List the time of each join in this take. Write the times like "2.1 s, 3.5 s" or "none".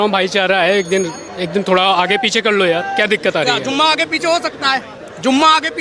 none